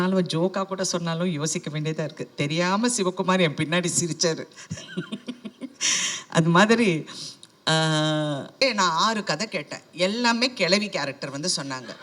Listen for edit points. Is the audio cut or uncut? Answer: cut